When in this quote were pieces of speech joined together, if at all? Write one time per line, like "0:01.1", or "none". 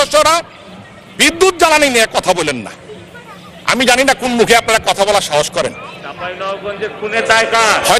none